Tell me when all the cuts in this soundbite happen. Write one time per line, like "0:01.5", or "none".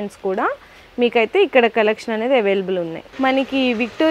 0:03.0